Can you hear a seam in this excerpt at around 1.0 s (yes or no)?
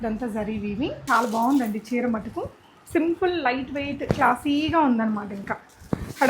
yes